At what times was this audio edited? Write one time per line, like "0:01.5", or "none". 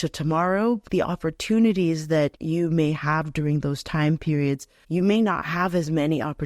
0:00.8
0:02.4
0:04.7